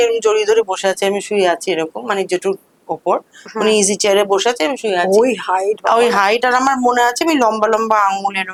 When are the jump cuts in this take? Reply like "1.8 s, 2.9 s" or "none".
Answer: none